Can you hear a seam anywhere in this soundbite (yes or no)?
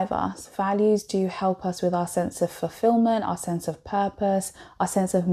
no